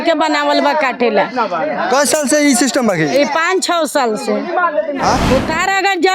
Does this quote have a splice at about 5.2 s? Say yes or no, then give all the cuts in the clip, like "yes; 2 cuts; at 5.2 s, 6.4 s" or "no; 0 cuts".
yes; 1 cut; at 5.2 s